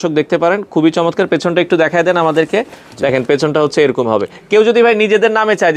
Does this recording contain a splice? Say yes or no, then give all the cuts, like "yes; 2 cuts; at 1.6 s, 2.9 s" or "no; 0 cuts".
no; 0 cuts